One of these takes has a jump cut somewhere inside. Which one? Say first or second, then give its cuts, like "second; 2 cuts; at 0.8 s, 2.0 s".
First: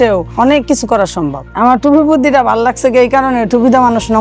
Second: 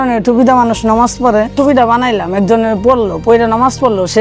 first; 1 cut; at 1.4 s